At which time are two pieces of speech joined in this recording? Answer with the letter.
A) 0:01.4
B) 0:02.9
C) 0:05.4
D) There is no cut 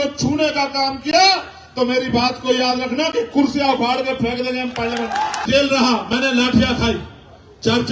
C